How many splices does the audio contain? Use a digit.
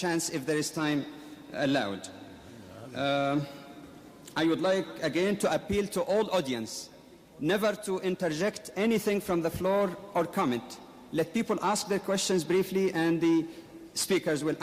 0